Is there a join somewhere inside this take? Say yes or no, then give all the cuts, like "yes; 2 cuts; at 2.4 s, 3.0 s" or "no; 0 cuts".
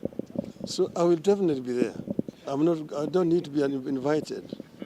yes; 1 cut; at 2.4 s